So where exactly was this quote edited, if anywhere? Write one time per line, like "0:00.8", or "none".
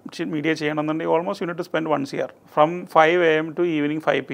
0:02.4